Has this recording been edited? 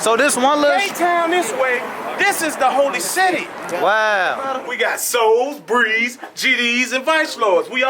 yes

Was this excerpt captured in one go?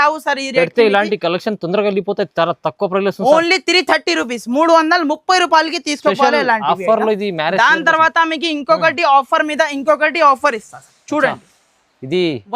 yes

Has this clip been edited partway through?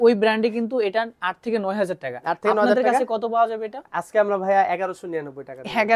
no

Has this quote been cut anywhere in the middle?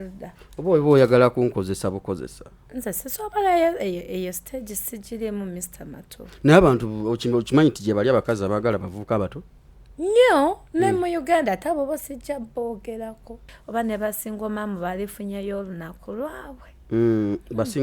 yes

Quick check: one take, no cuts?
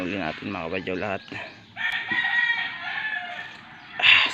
yes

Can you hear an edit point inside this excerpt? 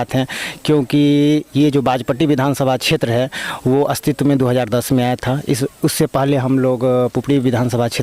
no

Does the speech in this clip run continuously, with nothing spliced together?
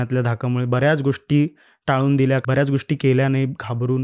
no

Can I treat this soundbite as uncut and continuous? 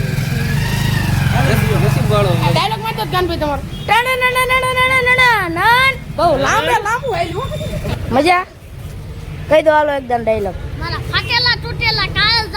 no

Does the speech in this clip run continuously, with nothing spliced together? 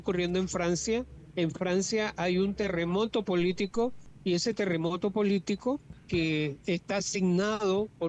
no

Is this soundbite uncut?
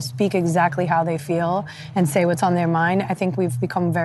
yes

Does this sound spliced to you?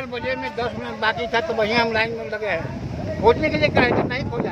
no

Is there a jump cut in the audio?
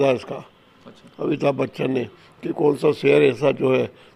no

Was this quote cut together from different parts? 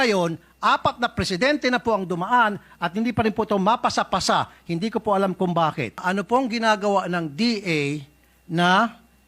yes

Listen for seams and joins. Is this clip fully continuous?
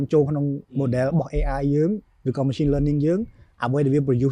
yes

